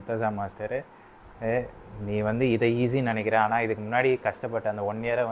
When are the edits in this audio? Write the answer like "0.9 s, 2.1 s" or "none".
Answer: none